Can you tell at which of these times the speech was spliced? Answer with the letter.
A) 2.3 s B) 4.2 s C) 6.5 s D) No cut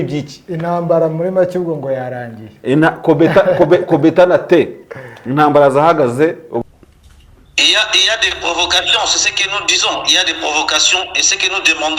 C